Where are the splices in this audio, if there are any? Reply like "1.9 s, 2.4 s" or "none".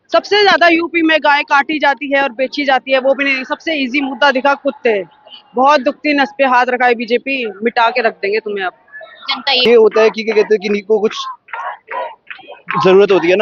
9.6 s